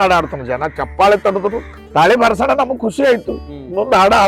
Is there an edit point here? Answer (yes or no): yes